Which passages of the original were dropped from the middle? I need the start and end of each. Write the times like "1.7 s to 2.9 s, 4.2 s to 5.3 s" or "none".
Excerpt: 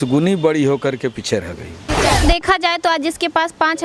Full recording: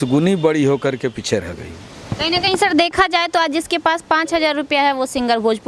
2.2 s to 2.7 s